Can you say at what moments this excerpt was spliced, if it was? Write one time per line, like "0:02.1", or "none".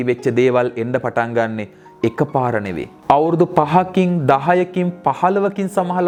none